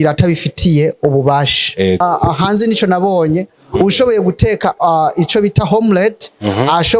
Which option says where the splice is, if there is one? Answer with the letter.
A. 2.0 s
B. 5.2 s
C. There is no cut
A